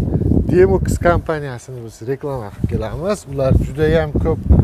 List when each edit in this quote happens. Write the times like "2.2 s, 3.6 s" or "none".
none